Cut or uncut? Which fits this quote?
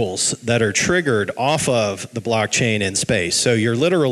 uncut